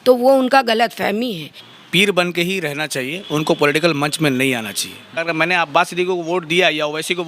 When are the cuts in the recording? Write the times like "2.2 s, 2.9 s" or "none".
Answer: 1.7 s, 5.1 s